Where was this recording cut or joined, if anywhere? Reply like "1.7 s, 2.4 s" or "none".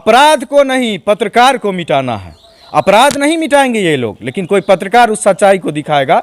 none